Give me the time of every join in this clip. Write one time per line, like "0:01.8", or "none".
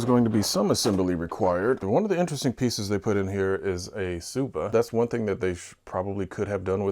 0:01.8
0:04.7